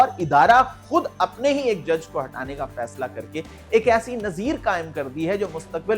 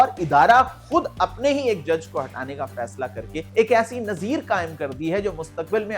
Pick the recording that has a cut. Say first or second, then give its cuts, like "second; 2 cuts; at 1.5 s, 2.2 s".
second; 1 cut; at 3.5 s